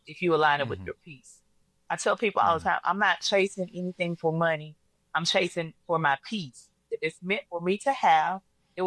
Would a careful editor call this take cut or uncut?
cut